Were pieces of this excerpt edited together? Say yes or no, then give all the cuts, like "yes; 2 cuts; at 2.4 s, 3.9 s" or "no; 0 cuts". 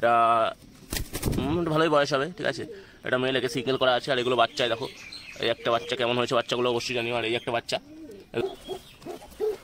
yes; 1 cut; at 8.4 s